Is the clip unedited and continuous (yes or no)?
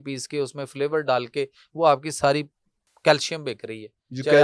yes